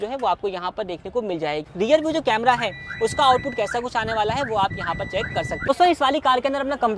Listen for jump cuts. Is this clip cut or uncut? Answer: cut